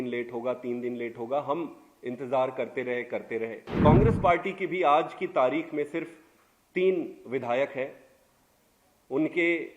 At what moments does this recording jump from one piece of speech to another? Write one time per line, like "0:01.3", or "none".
0:03.6